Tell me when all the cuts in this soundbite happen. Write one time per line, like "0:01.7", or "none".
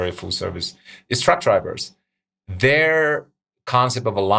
none